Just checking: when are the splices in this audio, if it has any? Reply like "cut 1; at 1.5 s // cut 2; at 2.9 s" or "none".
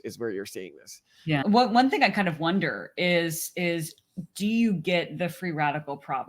cut 1; at 1.4 s